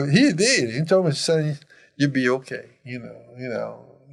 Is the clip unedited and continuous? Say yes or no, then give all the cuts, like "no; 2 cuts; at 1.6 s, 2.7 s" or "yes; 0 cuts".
yes; 0 cuts